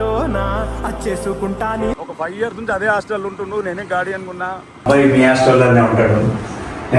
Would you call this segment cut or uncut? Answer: cut